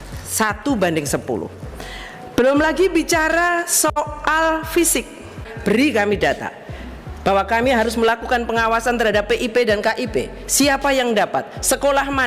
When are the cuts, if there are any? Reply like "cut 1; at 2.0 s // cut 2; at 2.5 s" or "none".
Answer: cut 1; at 5.5 s